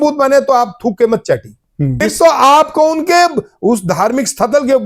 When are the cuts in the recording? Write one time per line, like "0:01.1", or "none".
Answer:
0:02.0